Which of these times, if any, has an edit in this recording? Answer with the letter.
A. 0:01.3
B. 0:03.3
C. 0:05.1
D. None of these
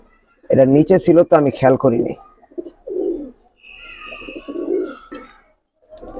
D